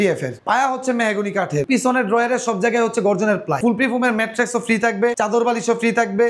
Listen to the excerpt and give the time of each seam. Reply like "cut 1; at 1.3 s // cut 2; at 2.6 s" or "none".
none